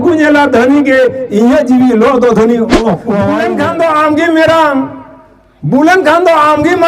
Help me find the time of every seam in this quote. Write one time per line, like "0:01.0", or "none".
0:03.4